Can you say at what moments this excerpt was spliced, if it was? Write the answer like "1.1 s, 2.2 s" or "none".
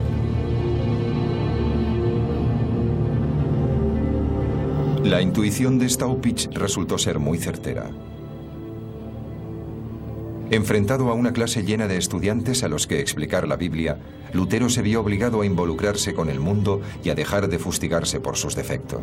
none